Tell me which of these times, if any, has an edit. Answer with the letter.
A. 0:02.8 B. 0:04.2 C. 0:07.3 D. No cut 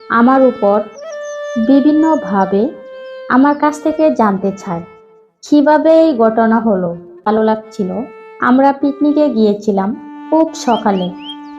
C